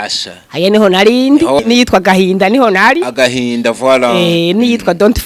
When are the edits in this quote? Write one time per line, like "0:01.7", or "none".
0:01.6